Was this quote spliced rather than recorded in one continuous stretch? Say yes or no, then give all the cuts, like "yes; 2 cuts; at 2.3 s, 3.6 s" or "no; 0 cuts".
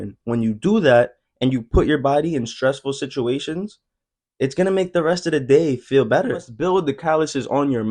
yes; 1 cut; at 6.5 s